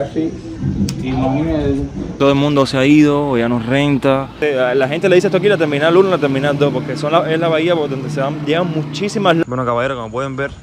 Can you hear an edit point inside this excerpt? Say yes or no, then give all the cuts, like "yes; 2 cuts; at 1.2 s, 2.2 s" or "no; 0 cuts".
yes; 3 cuts; at 2.0 s, 4.3 s, 9.4 s